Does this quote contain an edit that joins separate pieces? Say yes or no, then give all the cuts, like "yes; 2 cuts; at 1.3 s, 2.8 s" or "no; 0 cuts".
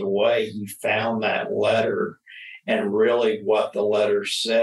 no; 0 cuts